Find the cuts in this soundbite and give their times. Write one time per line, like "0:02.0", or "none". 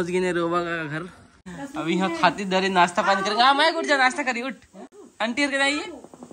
0:01.4